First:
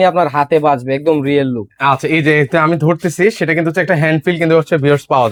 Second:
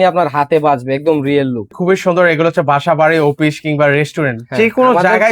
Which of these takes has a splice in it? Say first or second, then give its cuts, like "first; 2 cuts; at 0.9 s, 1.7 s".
second; 1 cut; at 1.7 s